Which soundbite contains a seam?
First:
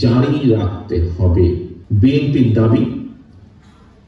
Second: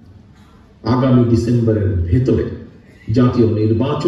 first; 1 cut; at 1.8 s

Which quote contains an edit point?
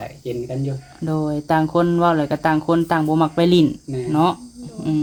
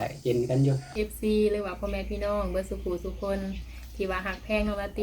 second; 1 cut; at 0.9 s

